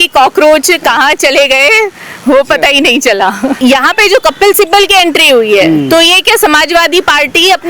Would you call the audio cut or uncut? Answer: cut